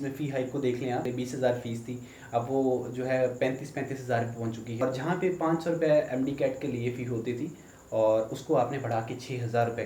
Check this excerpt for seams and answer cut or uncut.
cut